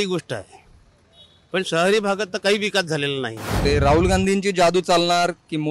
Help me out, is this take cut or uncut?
cut